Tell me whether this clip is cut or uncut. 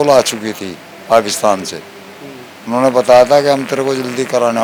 uncut